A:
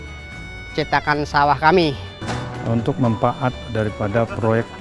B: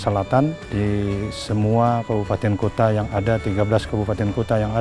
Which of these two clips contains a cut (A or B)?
A